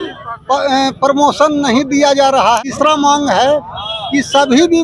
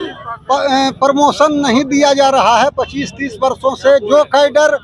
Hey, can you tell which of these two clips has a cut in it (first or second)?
first